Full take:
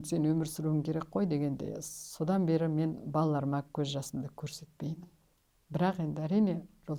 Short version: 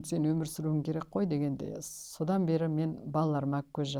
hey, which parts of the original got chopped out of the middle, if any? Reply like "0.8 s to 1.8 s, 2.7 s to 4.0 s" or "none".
none